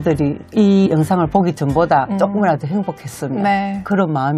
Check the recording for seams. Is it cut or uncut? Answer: uncut